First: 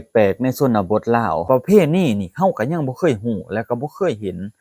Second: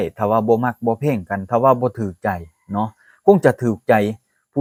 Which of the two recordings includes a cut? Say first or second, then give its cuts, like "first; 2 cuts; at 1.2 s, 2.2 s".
first; 1 cut; at 1.4 s